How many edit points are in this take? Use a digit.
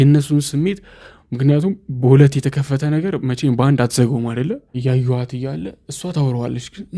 1